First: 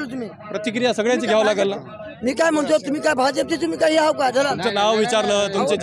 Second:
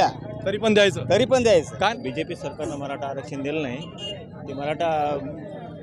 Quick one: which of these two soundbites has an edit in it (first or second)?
second